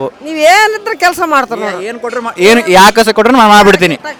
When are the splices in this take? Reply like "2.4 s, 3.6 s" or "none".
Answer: none